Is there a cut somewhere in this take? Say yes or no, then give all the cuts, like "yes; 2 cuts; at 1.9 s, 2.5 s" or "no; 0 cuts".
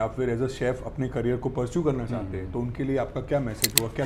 no; 0 cuts